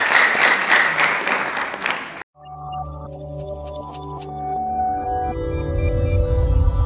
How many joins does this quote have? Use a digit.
1